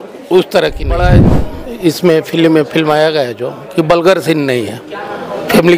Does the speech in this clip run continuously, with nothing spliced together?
no; 1 cut; at 1.1 s

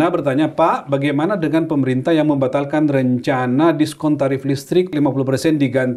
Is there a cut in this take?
yes; 1 cut; at 4.9 s

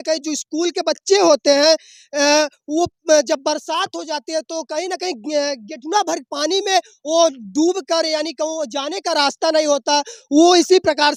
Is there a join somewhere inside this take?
no; 0 cuts

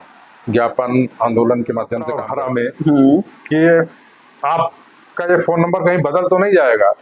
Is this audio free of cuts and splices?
no; 1 cut; at 2.2 s

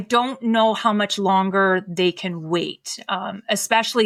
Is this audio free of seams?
yes; 0 cuts

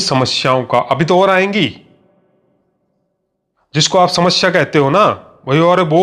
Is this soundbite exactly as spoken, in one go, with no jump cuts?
yes; 0 cuts

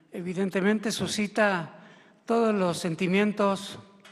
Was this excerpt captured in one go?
yes; 0 cuts

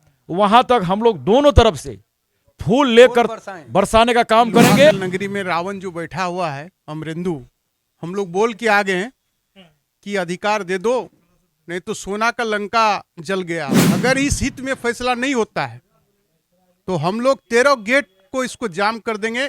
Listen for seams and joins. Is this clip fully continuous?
no; 2 cuts; at 5.0 s, 13.8 s

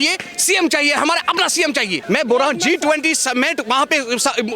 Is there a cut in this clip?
yes; 1 cut; at 2.0 s

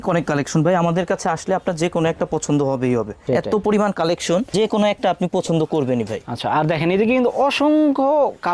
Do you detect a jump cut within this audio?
no; 0 cuts

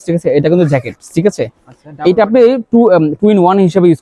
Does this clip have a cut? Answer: no; 0 cuts

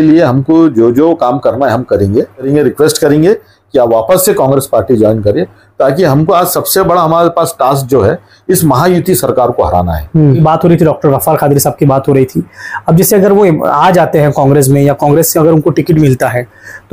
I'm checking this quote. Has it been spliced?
yes; 2 cuts; at 2.5 s, 10.4 s

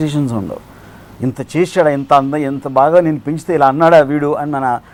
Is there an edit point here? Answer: no; 0 cuts

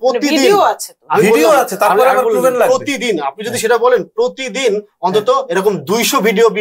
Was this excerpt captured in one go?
yes; 0 cuts

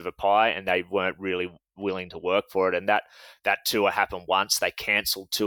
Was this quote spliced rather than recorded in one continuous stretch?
no; 0 cuts

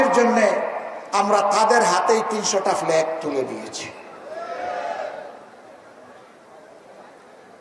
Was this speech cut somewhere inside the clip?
no; 0 cuts

